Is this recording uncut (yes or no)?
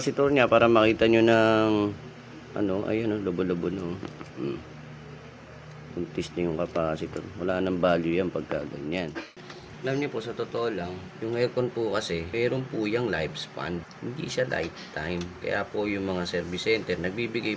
no